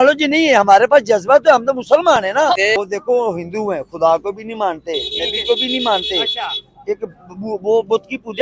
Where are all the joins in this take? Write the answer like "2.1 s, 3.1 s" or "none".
2.7 s